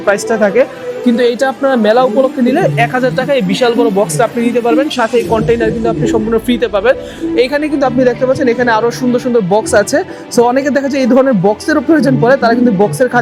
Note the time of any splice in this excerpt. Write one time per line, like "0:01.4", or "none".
none